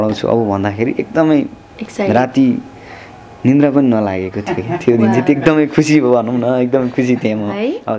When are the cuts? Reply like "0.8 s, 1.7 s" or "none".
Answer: none